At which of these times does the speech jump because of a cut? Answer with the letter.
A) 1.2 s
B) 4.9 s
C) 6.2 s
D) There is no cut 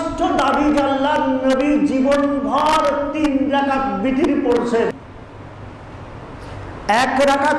B